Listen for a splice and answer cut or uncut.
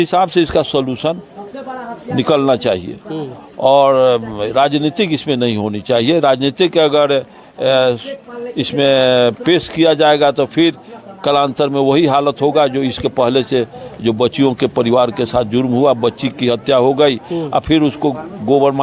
uncut